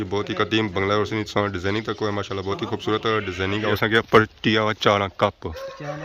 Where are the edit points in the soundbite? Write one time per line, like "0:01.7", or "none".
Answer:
0:03.8